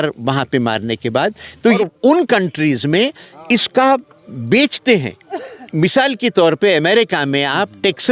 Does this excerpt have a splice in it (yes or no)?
yes